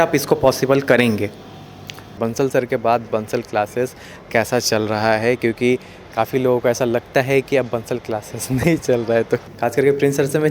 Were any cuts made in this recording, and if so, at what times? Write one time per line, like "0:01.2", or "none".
0:02.1
0:09.5

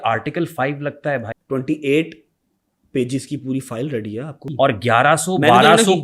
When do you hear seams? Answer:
0:01.3
0:04.5

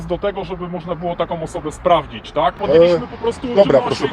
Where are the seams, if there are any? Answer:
0:02.6

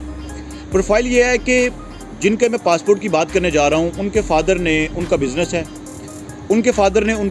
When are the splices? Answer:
none

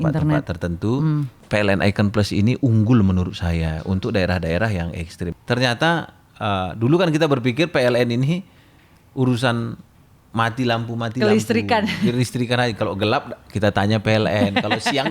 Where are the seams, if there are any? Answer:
0:01.4
0:05.3

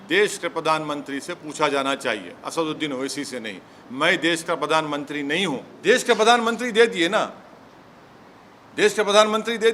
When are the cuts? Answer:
0:05.7

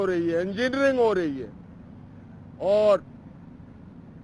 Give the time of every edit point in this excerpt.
none

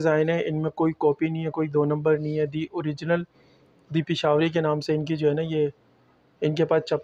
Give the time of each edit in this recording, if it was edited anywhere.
none

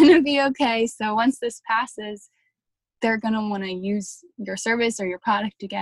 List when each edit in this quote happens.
none

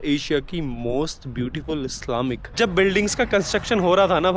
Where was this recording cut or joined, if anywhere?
0:02.4

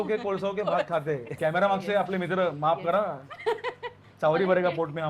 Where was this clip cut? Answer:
0:01.3

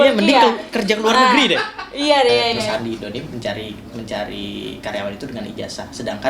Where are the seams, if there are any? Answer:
0:02.5

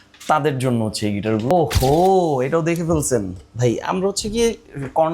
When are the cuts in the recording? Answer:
0:01.5

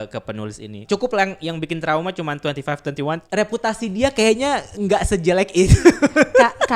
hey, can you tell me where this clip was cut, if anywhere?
0:00.8
0:03.2

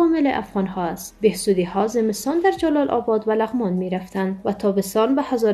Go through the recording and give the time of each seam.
0:01.1

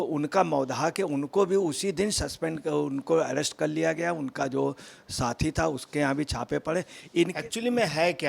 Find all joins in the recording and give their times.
0:07.3

